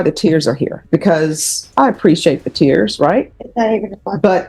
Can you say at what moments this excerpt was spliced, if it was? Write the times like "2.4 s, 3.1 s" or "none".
0.8 s, 1.6 s, 3.4 s